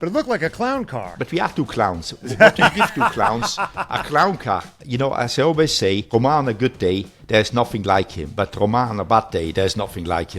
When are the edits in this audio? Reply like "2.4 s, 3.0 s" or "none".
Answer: 1.1 s, 4.8 s, 6.0 s